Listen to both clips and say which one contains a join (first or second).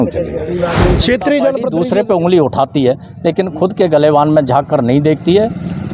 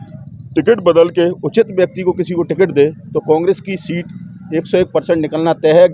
first